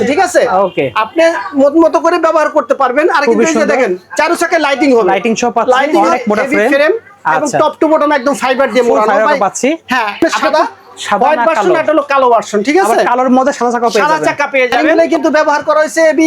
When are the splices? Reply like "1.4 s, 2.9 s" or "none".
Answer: 5.9 s, 10.2 s, 15.0 s

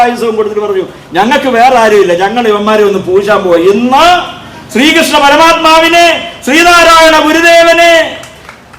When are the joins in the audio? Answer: none

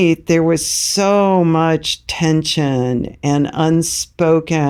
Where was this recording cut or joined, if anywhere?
none

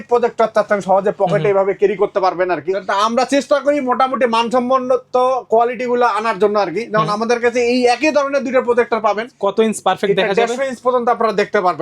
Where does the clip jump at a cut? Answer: 2.8 s, 9.3 s

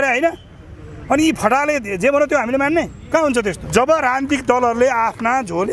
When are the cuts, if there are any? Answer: 3.6 s

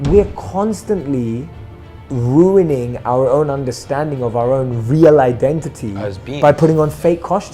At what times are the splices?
none

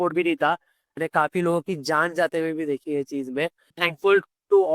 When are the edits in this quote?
0.9 s, 3.7 s

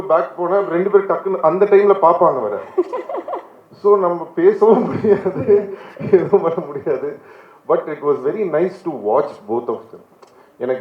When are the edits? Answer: none

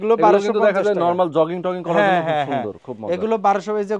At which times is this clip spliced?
none

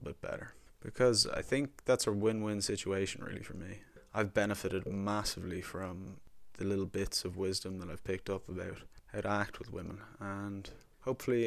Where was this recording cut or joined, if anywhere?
none

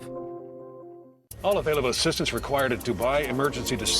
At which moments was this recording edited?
1.2 s

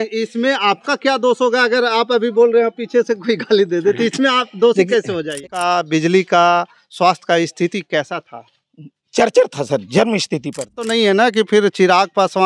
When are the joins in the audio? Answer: 5.4 s, 10.9 s

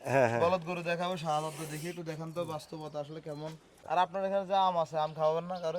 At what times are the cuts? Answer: 3.8 s

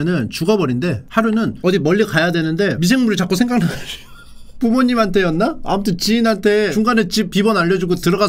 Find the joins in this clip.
1.0 s, 7.0 s

